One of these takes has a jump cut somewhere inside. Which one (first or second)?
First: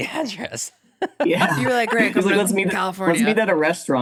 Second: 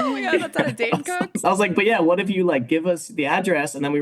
second